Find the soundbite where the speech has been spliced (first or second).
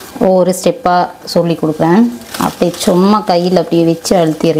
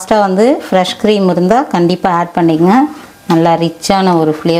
first